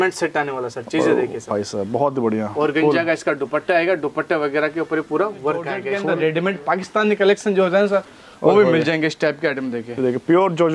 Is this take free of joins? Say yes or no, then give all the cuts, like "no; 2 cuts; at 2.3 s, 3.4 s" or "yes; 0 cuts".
no; 1 cut; at 5.9 s